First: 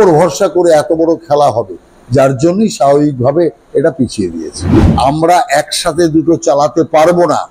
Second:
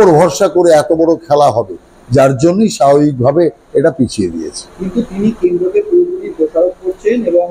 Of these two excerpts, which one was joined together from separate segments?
first; 1 cut; at 4.8 s

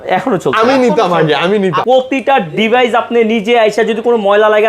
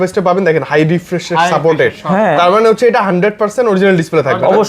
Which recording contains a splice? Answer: first; 1 cut; at 1.8 s

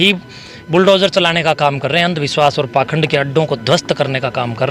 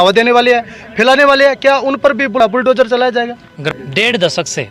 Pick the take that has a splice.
second; 2 cuts; at 2.4 s, 3.5 s

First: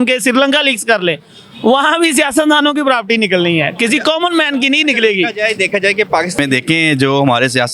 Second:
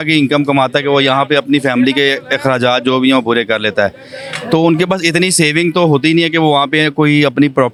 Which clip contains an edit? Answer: first; 1 cut; at 6.4 s

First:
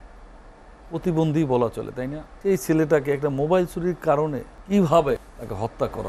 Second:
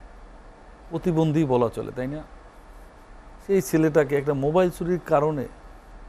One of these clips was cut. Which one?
first; 3 cuts; at 2.2 s, 4.5 s, 5.2 s

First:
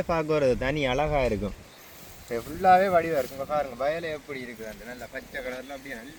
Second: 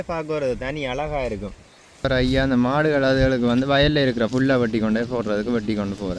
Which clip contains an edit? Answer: second; 1 cut; at 2.1 s

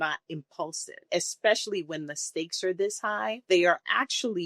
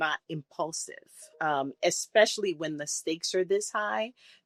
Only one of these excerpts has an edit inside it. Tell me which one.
first; 2 cuts; at 1.0 s, 3.4 s

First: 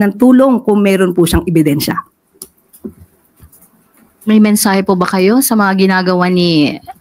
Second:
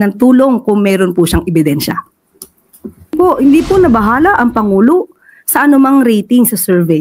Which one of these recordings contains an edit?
second; 1 cut; at 3.1 s

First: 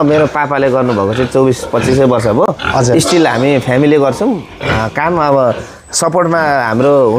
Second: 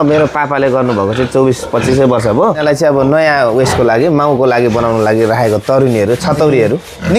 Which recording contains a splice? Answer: second; 1 cut; at 2.6 s

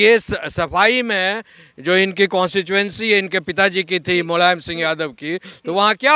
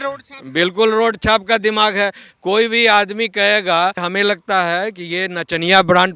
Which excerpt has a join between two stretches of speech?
second; 1 cut; at 4.0 s

